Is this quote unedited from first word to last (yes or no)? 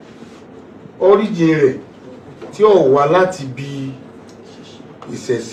yes